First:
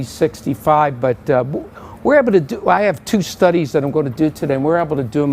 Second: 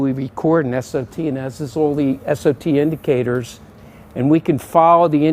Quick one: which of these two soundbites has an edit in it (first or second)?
first